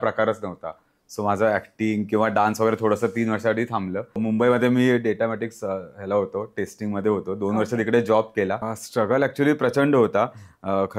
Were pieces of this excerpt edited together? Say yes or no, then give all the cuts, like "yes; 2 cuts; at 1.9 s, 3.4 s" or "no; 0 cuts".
yes; 2 cuts; at 4.2 s, 8.7 s